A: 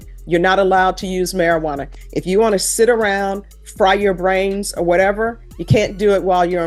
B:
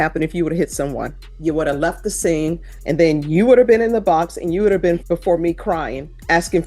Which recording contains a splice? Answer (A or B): B